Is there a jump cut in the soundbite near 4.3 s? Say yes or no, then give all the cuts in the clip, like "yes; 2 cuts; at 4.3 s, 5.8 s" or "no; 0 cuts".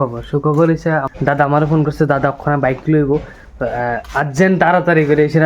no; 1 cut; at 1.1 s